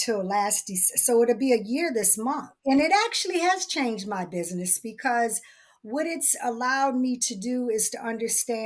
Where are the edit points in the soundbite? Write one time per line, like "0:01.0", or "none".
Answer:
0:02.6

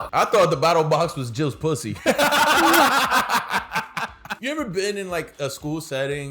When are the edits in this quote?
0:04.3

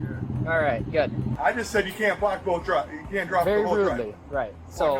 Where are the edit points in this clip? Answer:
0:01.3

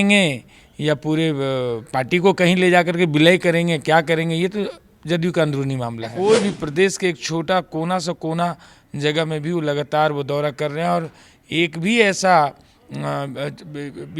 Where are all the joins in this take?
0:06.0

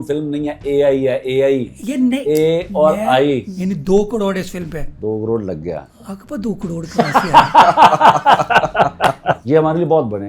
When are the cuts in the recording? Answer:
0:03.5
0:05.9
0:09.4

